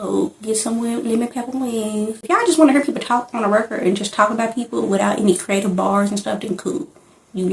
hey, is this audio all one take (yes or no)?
no